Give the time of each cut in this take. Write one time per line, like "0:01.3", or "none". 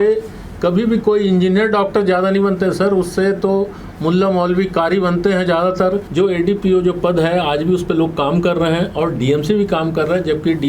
0:06.1